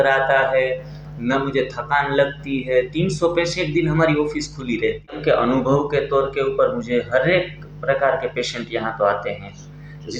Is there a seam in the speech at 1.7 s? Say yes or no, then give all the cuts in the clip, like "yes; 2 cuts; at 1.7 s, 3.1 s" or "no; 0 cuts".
no; 1 cut; at 5.2 s